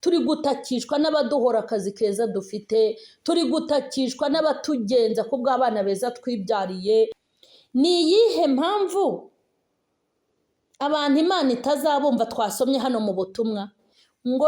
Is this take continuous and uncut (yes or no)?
no